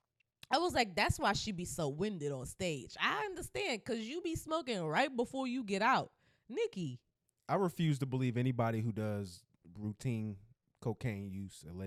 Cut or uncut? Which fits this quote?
uncut